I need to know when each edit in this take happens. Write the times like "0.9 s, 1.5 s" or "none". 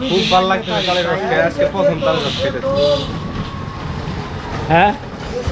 none